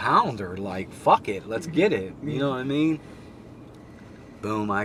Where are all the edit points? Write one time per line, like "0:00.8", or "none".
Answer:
none